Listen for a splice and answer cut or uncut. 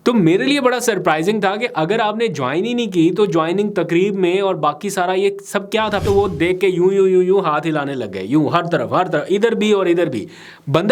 cut